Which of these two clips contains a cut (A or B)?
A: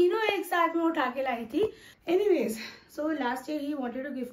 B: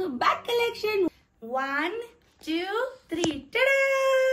A